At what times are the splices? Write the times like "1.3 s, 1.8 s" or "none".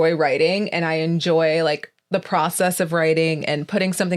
none

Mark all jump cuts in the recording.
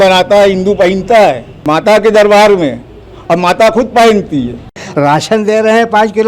1.6 s, 4.8 s

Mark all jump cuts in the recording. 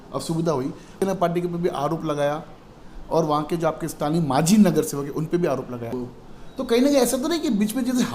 1.0 s, 5.9 s

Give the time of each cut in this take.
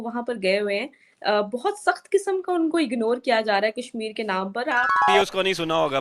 5.0 s

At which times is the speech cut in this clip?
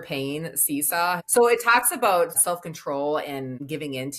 1.2 s, 2.3 s

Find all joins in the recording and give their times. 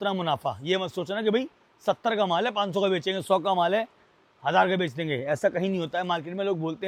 none

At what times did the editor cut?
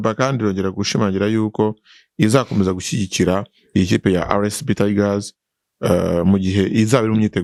none

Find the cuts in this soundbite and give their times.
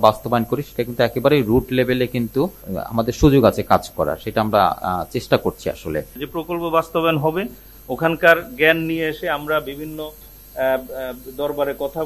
2.7 s, 6.1 s

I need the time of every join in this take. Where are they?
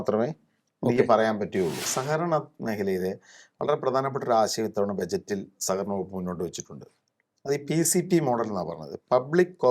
1.8 s

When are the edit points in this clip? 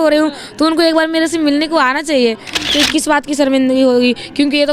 2.6 s

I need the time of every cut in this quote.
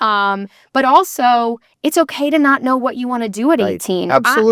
none

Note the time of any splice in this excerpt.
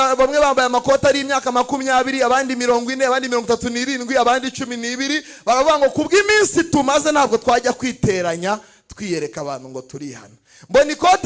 none

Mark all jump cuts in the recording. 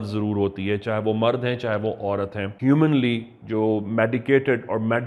2.4 s

